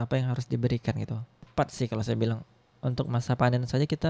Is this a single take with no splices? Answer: no; 1 cut; at 1.4 s

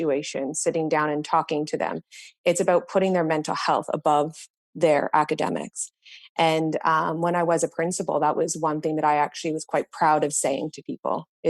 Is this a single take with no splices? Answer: yes; 0 cuts

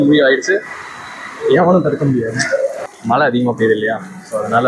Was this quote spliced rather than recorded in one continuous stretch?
yes; 1 cut; at 2.9 s

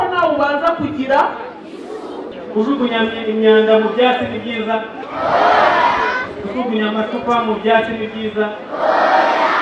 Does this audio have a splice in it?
yes; 1 cut; at 2.2 s

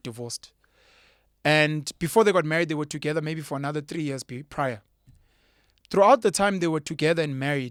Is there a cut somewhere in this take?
no; 0 cuts

